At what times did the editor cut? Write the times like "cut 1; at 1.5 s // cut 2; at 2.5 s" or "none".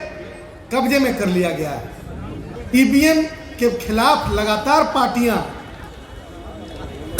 cut 1; at 2.4 s